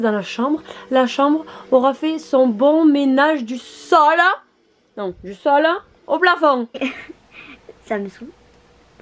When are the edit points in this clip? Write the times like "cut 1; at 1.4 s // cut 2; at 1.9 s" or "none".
cut 1; at 6.8 s